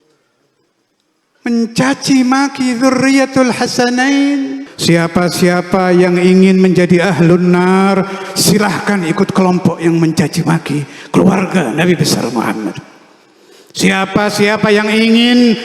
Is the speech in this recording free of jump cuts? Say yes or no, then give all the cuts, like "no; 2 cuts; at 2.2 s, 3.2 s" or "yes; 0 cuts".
no; 1 cut; at 4.7 s